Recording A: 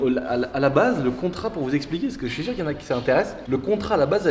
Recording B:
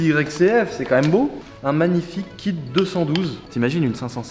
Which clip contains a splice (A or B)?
B